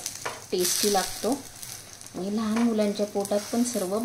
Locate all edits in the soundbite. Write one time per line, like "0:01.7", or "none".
none